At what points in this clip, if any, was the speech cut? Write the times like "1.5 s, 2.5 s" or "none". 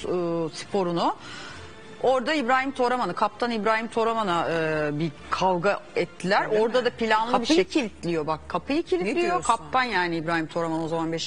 7.3 s